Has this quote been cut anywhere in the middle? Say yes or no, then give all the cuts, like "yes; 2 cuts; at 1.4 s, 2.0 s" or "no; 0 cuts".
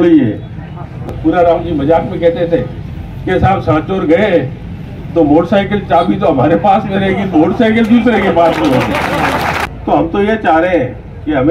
yes; 2 cuts; at 1.1 s, 9.7 s